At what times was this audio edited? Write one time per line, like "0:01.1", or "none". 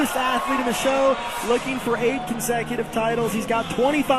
none